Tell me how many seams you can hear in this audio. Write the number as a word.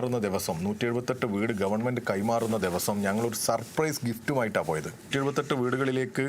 one